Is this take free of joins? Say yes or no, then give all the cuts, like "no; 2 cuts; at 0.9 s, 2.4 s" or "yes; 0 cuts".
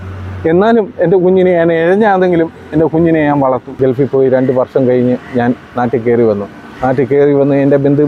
no; 1 cut; at 3.7 s